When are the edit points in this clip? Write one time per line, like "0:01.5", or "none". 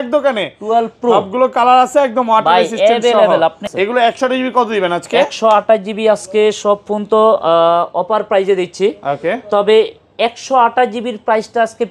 0:03.7